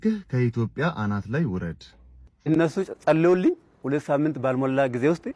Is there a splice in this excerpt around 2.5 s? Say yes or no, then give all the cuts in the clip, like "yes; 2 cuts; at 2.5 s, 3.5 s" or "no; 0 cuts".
yes; 1 cut; at 2.5 s